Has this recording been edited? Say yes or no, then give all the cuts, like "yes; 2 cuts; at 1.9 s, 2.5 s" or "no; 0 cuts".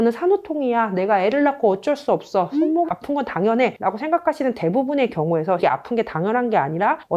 no; 0 cuts